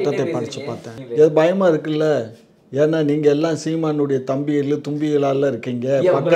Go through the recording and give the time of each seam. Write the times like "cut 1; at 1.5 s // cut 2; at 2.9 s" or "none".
cut 1; at 0.9 s